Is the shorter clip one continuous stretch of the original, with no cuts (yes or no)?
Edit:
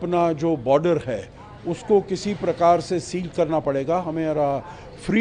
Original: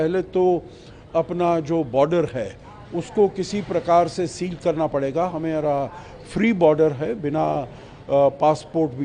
yes